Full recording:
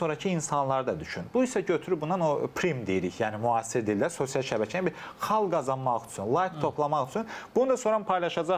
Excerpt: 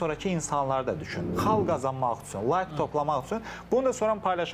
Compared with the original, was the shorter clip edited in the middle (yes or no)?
yes